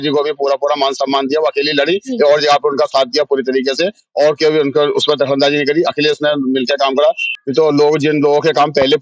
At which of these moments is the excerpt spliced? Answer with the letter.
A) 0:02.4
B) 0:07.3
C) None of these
B